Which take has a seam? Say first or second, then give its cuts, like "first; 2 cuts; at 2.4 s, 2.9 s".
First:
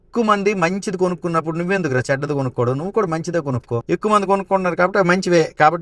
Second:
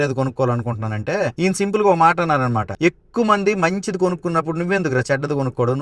first; 1 cut; at 3.8 s